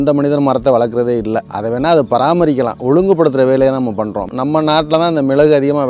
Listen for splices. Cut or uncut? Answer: cut